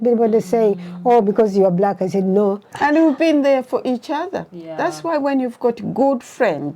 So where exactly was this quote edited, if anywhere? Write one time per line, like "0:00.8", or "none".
0:02.7